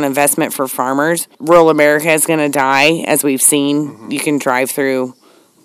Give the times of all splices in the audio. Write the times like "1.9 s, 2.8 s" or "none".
1.3 s